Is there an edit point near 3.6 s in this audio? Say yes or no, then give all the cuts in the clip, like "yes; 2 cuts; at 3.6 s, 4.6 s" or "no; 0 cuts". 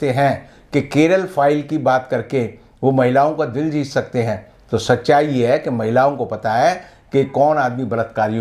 no; 0 cuts